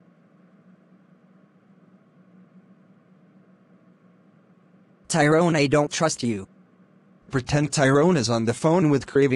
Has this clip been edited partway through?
yes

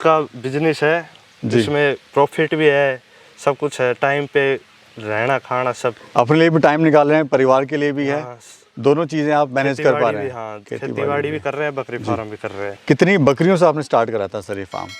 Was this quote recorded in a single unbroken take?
yes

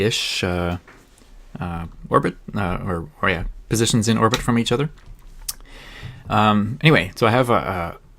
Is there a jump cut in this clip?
yes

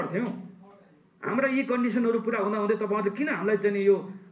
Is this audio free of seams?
yes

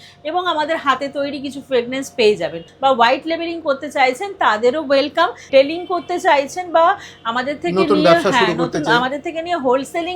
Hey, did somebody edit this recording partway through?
yes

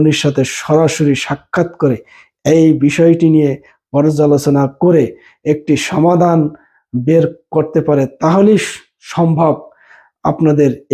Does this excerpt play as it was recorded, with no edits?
yes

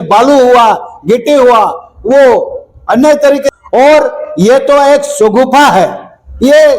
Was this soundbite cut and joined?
yes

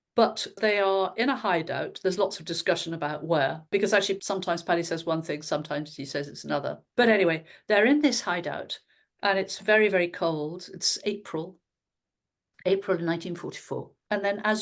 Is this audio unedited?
no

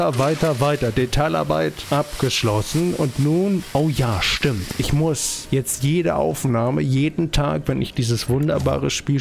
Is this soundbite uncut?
no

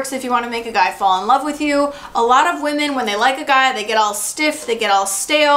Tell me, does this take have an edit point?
no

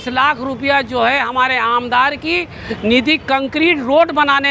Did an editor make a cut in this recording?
no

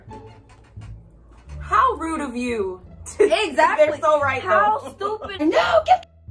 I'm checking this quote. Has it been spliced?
yes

